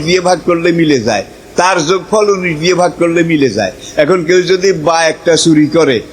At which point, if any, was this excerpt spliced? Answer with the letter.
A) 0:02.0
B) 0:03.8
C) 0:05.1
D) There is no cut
D